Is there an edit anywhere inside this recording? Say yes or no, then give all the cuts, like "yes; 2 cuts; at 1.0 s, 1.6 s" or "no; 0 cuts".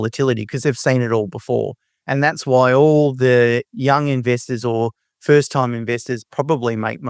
no; 0 cuts